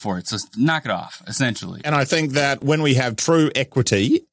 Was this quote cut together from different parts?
yes; 1 cut; at 1.7 s

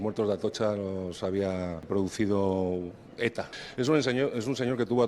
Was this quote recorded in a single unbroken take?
no; 2 cuts; at 1.8 s, 3.6 s

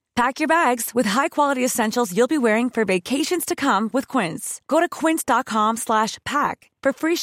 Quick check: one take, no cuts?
yes; 0 cuts

